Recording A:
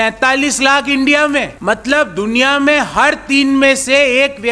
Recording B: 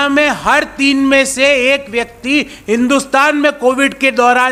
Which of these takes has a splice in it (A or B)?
A